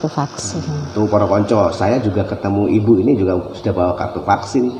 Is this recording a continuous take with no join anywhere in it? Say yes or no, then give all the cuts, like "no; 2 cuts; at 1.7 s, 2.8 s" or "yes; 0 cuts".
yes; 0 cuts